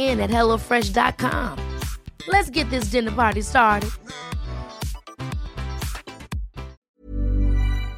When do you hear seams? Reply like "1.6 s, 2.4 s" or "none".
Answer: 6.8 s